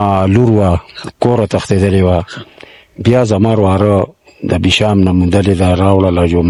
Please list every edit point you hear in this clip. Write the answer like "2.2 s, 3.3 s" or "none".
none

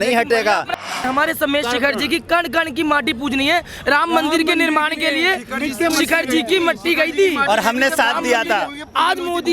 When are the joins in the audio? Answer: 1.0 s

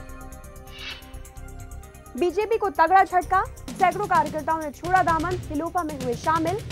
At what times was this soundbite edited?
none

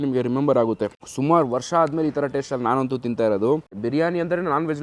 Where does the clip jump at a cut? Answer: 1.0 s, 3.8 s

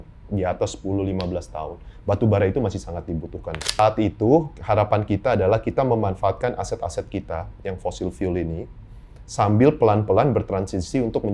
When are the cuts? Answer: 3.8 s

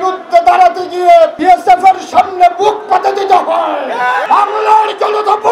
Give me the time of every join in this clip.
1.4 s, 4.2 s

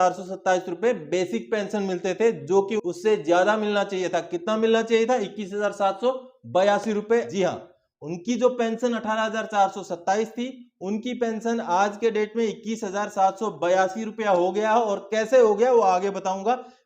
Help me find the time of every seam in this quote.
2.7 s, 7.3 s

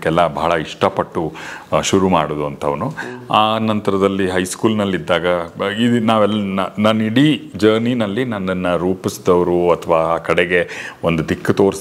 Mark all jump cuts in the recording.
none

